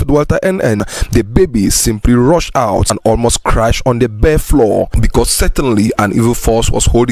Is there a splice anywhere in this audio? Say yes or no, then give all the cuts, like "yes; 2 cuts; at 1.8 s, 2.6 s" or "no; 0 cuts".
yes; 2 cuts; at 0.8 s, 2.9 s